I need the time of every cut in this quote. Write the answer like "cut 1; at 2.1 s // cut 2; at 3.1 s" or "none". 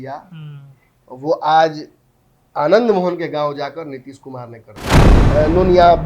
cut 1; at 5.2 s